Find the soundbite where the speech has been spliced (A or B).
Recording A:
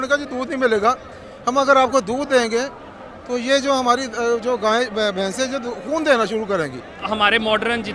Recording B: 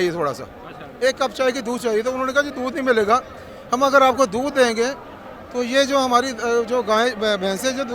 A